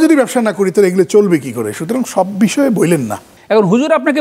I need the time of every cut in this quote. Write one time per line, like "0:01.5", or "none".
0:03.3